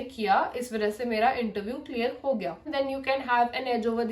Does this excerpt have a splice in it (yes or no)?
yes